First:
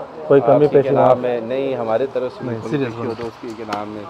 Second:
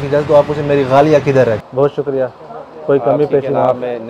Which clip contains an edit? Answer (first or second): second